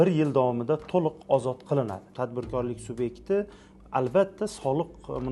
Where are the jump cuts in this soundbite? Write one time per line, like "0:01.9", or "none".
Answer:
0:02.1